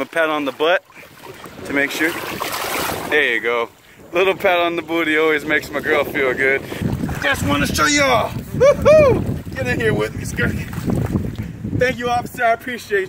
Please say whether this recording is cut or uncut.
cut